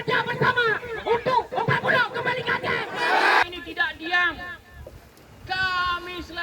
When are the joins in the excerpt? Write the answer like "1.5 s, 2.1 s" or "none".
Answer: 3.4 s